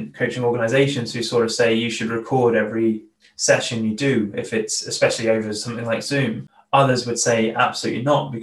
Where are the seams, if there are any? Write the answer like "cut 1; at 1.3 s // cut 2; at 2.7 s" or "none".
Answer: cut 1; at 3.1 s // cut 2; at 6.5 s